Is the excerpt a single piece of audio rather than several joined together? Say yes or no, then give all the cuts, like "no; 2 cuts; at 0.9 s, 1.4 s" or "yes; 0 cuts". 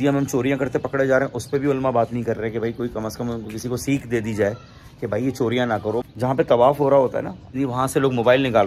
no; 2 cuts; at 6.1 s, 7.5 s